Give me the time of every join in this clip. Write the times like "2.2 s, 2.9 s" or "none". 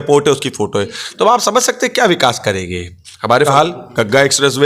3.5 s